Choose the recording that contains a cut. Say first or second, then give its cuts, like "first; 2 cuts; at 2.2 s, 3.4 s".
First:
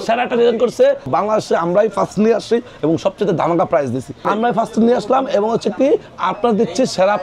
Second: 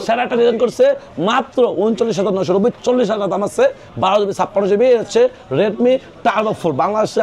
first; 2 cuts; at 1.1 s, 4.2 s